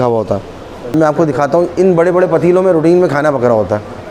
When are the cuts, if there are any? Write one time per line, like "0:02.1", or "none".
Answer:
0:01.0